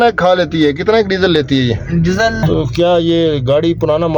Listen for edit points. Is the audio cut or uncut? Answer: cut